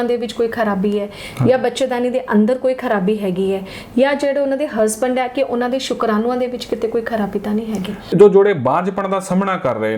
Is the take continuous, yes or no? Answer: no